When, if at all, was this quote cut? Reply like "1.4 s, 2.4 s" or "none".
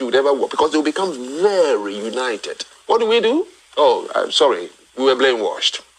1.2 s